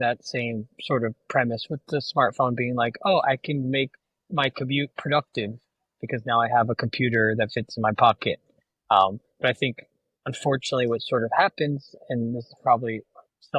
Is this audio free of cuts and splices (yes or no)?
yes